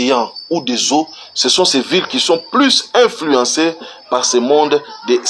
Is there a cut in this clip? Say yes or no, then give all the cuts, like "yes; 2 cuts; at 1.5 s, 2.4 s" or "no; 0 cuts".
no; 0 cuts